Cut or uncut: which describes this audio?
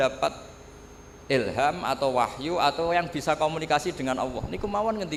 uncut